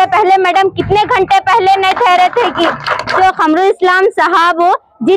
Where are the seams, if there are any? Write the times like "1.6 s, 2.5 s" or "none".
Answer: 3.1 s